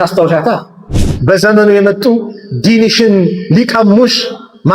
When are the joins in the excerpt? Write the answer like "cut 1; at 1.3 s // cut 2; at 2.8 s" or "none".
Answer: cut 1; at 0.9 s